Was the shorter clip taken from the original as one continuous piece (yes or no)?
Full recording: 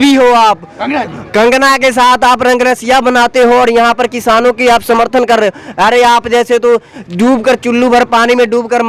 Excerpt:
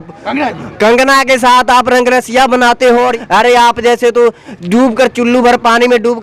no